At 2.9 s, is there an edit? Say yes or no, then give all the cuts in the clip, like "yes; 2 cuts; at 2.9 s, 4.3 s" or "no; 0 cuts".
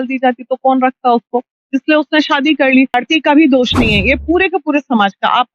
yes; 1 cut; at 2.9 s